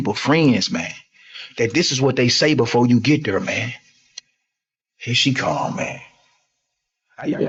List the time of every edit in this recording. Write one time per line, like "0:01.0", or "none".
none